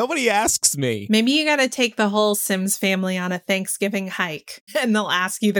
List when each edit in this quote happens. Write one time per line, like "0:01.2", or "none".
0:01.0
0:04.5